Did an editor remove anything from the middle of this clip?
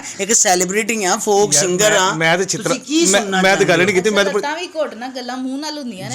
no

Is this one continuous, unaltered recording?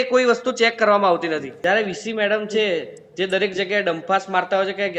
no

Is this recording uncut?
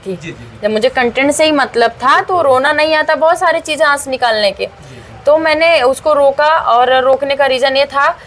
yes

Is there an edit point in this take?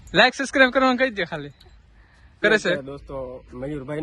yes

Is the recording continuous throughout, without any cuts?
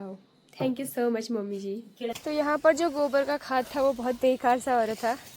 no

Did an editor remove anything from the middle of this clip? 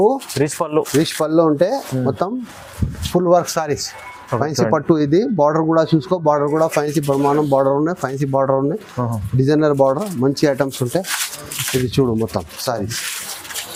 no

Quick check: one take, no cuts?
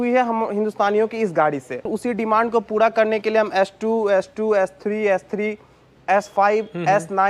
no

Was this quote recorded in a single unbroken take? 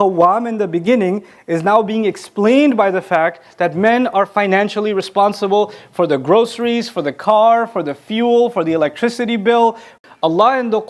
no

